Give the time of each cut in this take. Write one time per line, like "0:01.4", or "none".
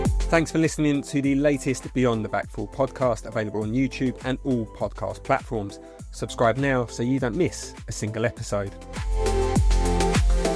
none